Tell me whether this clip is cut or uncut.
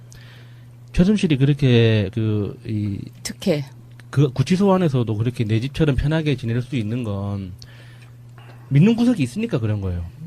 cut